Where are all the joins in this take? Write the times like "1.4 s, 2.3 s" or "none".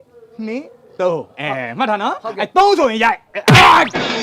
none